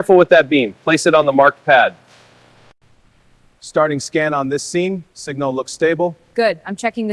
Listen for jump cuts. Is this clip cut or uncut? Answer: cut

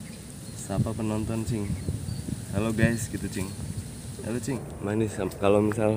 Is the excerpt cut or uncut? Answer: cut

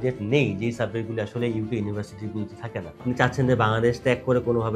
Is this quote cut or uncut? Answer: cut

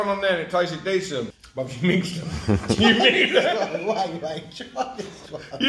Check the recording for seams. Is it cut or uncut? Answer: cut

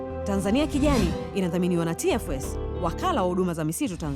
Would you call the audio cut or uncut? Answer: uncut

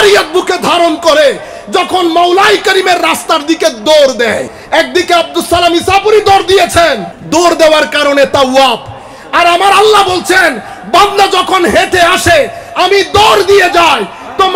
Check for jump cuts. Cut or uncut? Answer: cut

